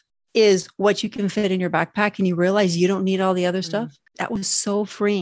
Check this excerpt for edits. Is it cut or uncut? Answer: cut